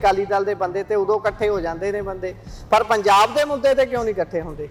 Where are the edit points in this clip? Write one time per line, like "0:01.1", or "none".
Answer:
none